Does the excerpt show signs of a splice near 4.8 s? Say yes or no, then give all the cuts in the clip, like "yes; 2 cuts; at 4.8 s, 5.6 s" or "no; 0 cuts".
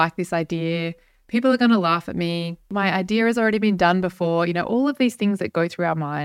no; 1 cut; at 2.7 s